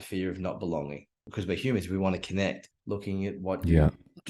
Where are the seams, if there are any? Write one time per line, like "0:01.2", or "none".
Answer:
0:01.3
0:02.7